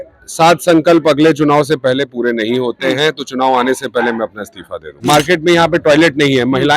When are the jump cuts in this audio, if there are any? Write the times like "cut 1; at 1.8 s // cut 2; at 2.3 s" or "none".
cut 1; at 4.9 s